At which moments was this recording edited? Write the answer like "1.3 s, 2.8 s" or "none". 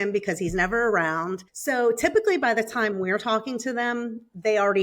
1.5 s